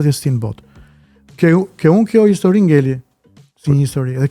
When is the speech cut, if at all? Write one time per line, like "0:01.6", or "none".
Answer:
none